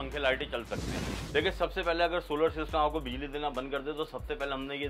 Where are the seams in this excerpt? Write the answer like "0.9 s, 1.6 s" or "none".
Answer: 1.1 s